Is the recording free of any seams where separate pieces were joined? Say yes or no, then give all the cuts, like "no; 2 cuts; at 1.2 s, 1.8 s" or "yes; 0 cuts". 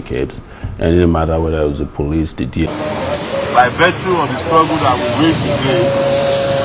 no; 1 cut; at 2.7 s